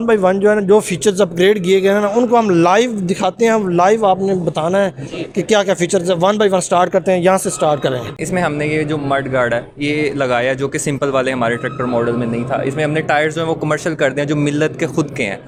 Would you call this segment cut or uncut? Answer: uncut